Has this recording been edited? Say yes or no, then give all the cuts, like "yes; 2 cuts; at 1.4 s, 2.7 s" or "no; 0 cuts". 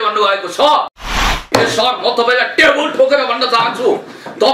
yes; 1 cut; at 1.2 s